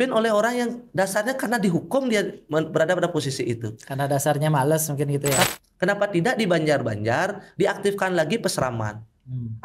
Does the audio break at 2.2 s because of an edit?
no; 1 cut; at 5.5 s

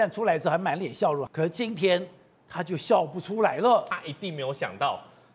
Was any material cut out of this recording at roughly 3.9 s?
yes; 2 cuts; at 1.3 s, 3.9 s

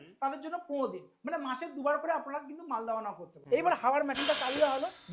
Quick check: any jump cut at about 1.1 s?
no; 1 cut; at 3.3 s

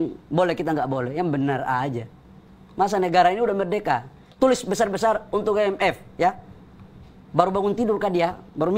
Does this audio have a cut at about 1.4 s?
no; 1 cut; at 4.2 s

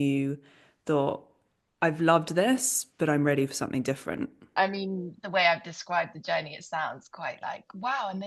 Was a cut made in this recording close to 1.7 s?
no; 1 cut; at 4.5 s

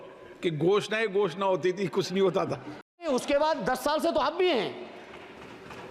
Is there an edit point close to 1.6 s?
no; 1 cut; at 3.1 s

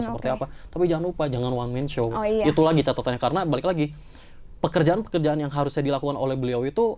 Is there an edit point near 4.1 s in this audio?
no; 0 cuts

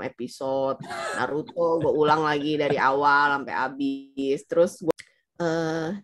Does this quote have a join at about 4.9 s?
yes; 1 cut; at 4.9 s

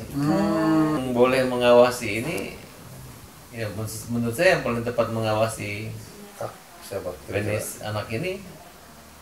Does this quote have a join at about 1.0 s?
yes; 1 cut; at 1.0 s

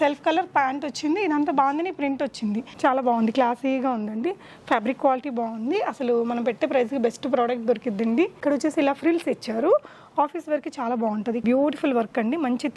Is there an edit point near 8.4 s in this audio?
yes; 3 cuts; at 2.7 s, 8.4 s, 11.4 s

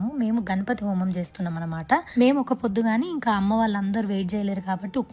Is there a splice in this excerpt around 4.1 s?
no; 1 cut; at 2.1 s

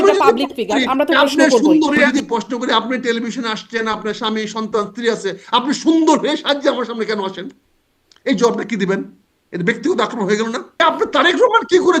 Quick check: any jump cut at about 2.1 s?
yes; 2 cuts; at 2.1 s, 10.8 s

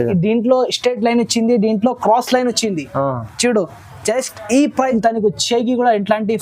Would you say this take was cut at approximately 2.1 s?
no; 1 cut; at 4.9 s

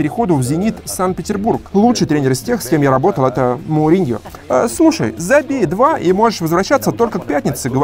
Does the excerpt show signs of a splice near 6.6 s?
no; 2 cuts; at 1.6 s, 4.2 s

